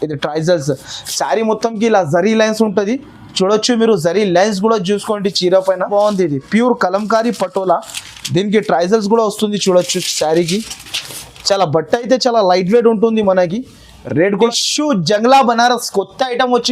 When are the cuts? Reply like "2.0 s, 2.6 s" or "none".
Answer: 5.9 s, 14.3 s